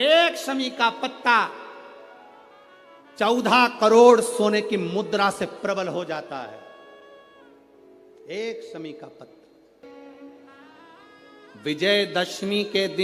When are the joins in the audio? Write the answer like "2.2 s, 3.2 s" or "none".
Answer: 9.8 s